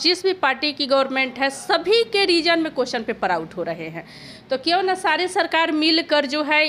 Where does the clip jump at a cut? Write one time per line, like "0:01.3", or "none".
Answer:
none